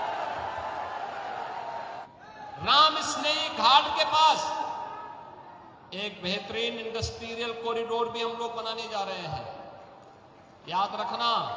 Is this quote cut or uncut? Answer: cut